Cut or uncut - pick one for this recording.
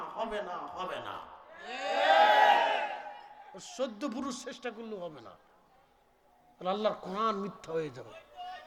uncut